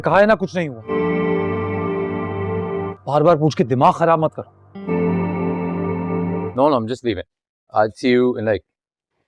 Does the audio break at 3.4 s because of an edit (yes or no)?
no